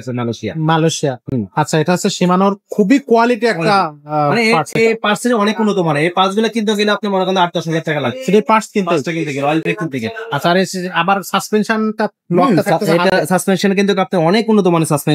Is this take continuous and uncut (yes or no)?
yes